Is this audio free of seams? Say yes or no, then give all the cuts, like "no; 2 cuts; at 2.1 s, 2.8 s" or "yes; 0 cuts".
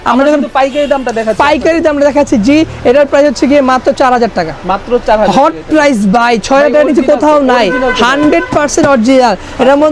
yes; 0 cuts